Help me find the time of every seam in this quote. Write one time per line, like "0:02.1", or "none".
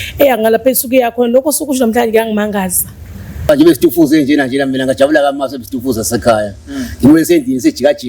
0:03.5